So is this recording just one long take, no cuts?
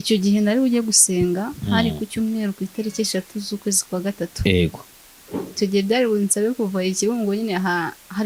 yes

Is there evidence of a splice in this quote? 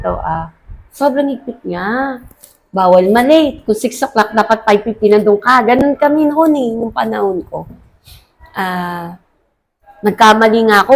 no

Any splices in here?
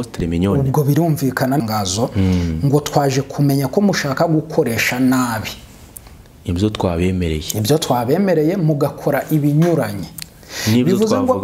yes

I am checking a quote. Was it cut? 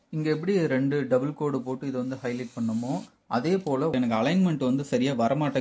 yes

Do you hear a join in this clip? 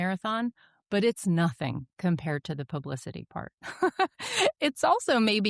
no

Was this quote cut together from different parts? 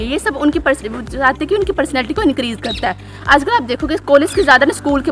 no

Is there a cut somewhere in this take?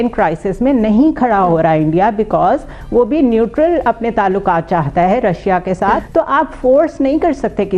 yes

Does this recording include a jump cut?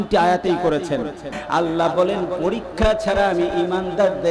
yes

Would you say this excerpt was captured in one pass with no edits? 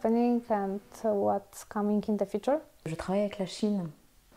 no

